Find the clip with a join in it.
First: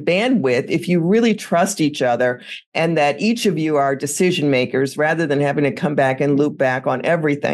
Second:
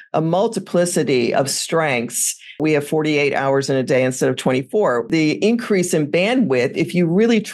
second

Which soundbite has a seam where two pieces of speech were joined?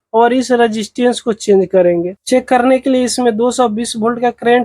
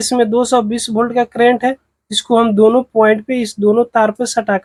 first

